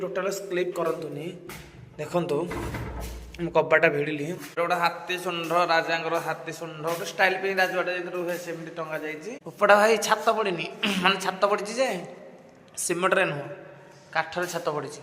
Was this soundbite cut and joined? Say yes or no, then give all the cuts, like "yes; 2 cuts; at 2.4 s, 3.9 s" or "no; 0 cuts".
yes; 2 cuts; at 4.5 s, 9.4 s